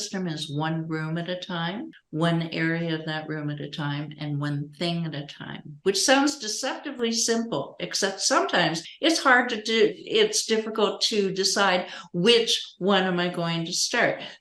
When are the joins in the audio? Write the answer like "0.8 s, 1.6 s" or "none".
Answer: none